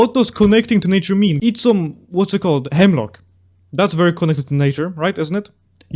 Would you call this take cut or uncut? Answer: uncut